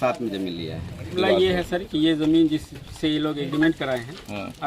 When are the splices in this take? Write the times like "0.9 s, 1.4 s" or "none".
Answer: 1.1 s